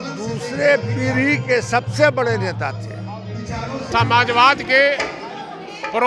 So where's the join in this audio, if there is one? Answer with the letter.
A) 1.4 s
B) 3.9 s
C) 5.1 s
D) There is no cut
B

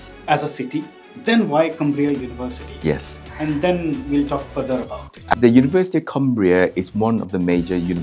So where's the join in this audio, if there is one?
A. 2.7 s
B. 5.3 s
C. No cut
B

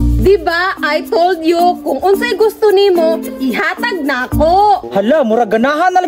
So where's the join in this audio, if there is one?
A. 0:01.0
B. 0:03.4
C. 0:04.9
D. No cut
C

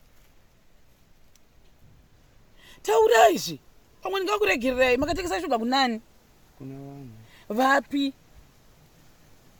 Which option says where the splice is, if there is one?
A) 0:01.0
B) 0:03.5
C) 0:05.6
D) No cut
D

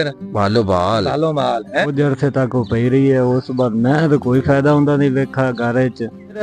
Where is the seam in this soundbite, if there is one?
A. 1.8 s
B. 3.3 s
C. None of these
A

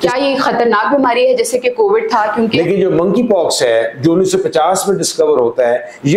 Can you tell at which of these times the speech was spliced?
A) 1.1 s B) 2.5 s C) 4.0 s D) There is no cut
B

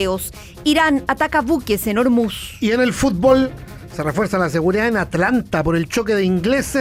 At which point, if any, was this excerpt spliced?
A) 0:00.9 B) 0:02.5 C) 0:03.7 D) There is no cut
D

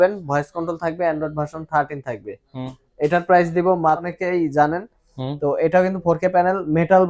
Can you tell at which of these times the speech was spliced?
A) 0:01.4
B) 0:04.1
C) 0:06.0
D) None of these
B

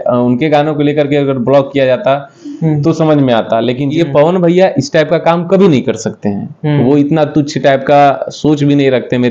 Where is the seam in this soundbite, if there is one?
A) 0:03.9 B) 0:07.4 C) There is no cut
A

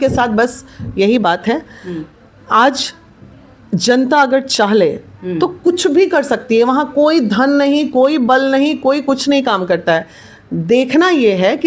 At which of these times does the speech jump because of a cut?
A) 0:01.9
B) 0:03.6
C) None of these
C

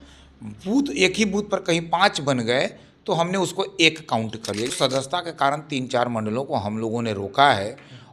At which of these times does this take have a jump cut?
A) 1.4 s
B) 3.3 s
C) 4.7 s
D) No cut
C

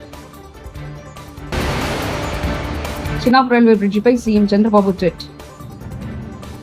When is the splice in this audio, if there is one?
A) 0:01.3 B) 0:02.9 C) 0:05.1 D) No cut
A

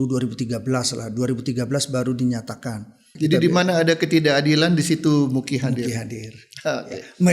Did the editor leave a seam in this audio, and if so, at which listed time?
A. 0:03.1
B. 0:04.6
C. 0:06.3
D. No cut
A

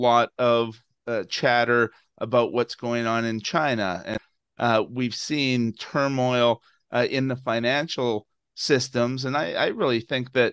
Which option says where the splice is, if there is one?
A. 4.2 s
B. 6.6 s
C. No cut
A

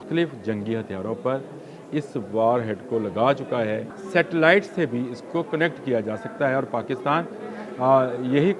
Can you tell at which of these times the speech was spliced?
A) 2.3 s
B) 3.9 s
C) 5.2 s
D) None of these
B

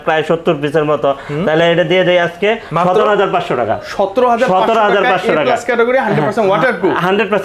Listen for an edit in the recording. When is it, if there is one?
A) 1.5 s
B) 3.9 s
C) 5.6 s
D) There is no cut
D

